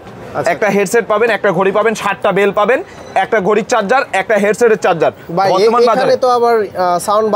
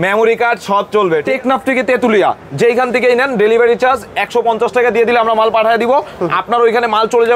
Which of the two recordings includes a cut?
second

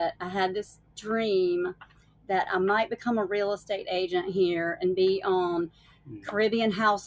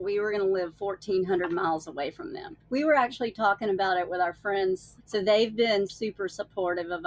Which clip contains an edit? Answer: second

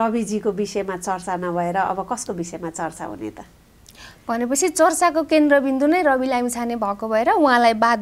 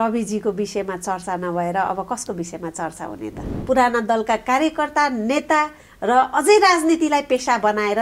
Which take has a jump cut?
second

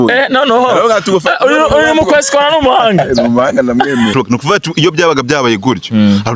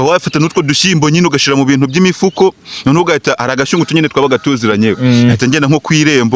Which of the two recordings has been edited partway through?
first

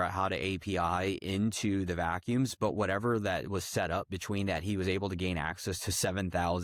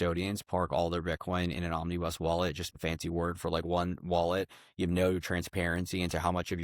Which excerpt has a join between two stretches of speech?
second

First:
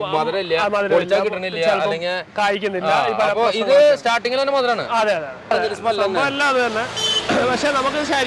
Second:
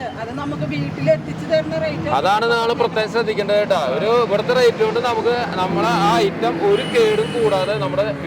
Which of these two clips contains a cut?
first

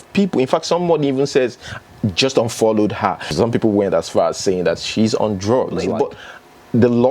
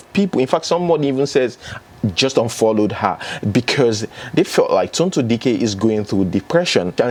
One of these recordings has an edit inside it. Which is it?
first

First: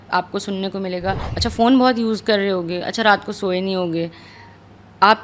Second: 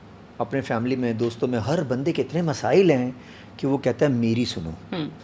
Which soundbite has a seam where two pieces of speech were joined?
first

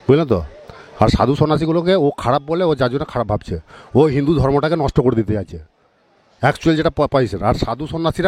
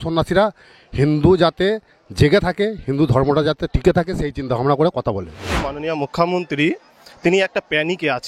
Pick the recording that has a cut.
second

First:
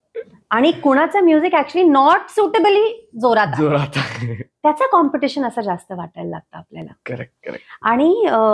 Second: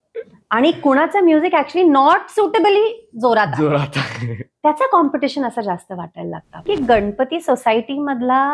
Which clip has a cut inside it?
second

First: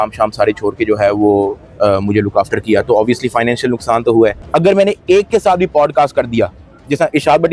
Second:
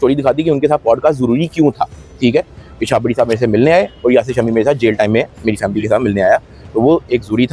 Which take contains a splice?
first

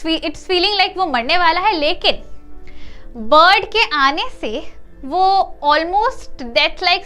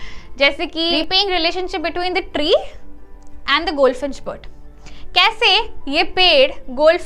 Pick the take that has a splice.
second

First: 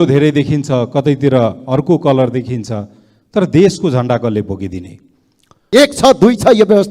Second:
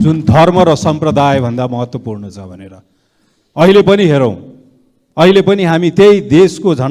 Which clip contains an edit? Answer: first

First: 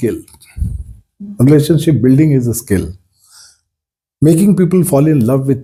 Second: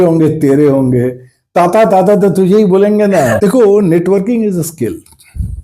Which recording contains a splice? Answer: second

